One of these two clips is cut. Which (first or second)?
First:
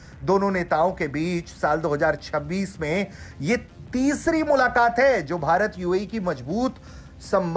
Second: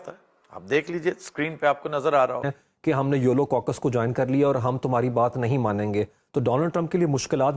second